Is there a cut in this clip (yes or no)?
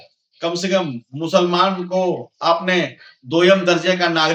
no